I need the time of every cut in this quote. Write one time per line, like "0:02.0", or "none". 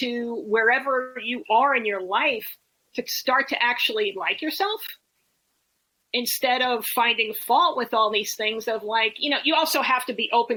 none